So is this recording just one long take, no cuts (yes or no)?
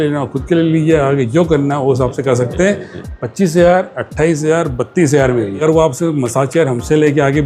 no